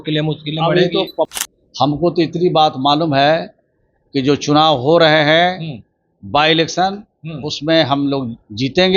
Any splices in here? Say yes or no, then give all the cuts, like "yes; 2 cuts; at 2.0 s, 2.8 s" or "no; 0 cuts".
yes; 1 cut; at 1.4 s